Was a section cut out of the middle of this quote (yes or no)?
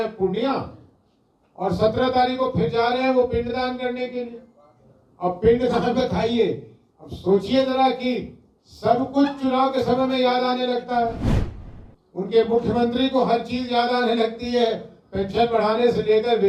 no